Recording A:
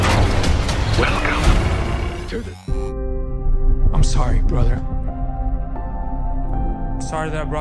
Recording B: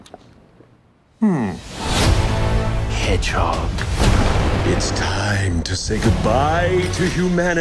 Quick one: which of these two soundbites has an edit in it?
A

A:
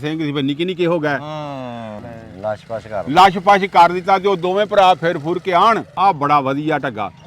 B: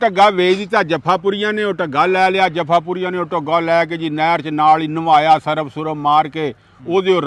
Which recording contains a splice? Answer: A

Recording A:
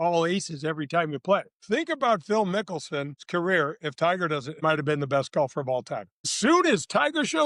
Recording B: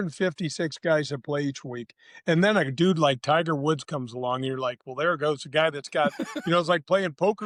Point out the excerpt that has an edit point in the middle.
A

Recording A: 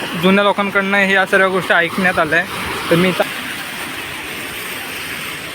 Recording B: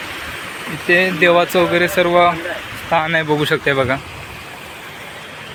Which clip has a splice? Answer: A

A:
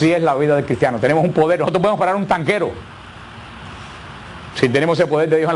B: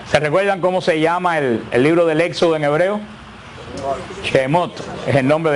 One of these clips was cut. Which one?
A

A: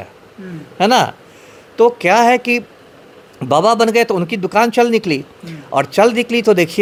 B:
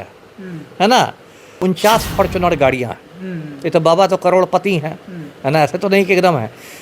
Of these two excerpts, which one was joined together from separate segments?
B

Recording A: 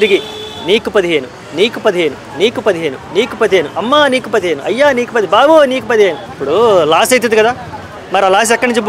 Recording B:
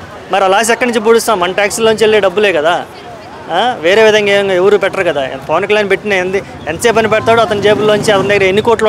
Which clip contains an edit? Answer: A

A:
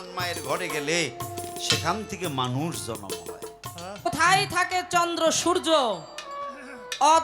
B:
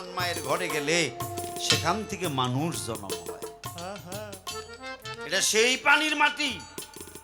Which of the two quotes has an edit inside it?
A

